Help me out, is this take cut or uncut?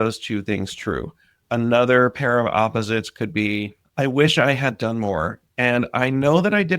cut